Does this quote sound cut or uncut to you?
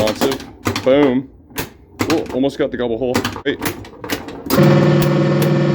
cut